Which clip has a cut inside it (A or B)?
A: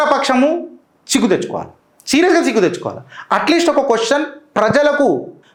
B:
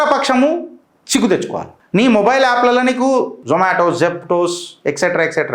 B